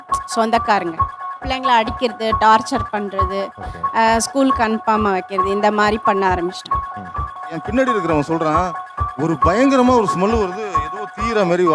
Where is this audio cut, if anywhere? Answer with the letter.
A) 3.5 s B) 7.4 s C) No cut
B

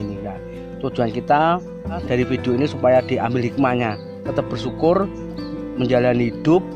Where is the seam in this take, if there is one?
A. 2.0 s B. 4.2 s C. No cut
A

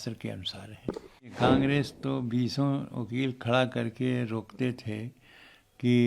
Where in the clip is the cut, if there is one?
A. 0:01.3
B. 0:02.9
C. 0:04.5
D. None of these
A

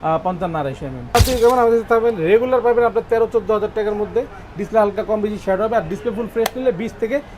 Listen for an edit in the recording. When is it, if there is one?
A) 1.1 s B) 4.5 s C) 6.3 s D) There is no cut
A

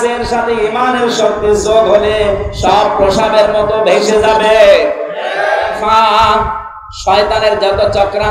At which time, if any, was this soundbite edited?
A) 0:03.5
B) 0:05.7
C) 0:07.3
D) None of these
B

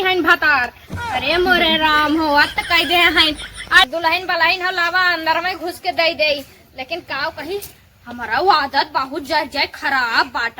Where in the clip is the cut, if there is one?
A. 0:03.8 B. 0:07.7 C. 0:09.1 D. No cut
A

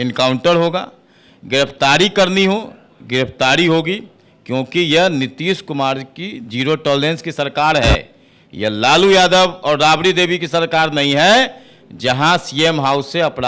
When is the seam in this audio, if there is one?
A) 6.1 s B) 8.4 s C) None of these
C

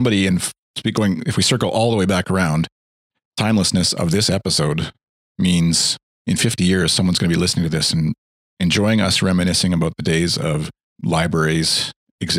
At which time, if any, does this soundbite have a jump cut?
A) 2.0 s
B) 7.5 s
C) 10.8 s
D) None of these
C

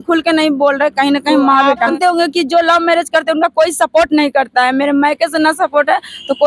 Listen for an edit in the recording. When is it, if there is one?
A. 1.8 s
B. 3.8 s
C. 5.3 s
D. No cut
A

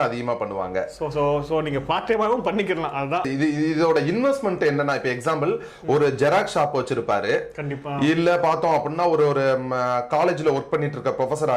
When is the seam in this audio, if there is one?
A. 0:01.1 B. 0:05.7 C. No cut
C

